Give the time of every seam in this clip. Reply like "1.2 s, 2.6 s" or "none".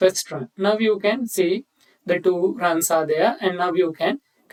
none